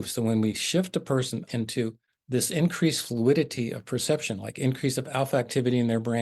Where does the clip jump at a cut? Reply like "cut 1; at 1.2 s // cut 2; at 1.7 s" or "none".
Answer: cut 1; at 1.6 s

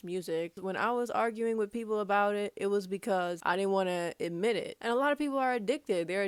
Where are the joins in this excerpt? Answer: cut 1; at 4.7 s

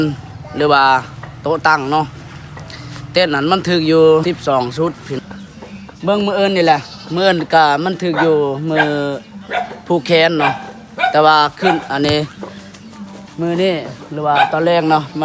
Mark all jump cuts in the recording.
cut 1; at 4.2 s // cut 2; at 5.2 s

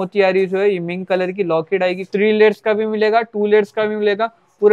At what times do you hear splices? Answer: cut 1; at 2.1 s

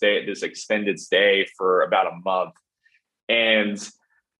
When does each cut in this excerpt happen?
none

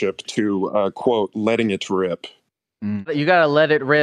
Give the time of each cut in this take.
cut 1; at 3.1 s

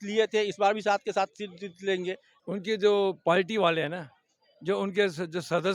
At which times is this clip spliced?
cut 1; at 2.3 s

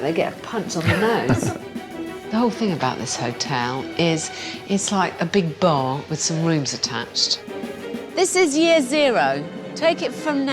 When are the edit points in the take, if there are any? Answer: cut 1; at 2.0 s // cut 2; at 7.8 s

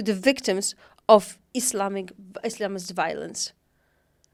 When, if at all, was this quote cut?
none

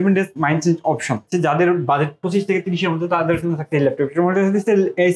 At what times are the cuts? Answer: cut 1; at 1.3 s

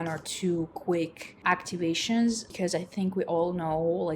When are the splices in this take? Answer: cut 1; at 1.3 s // cut 2; at 2.5 s

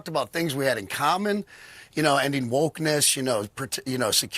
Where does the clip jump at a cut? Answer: cut 1; at 3.1 s

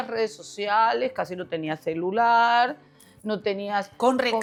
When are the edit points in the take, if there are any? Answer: none

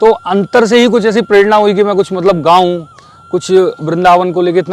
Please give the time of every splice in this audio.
none

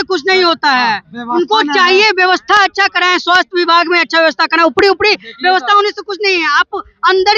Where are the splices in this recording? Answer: none

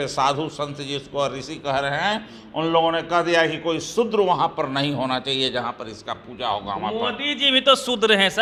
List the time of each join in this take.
none

